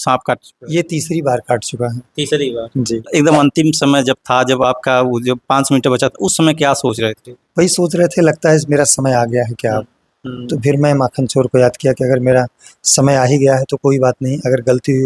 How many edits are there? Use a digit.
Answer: 1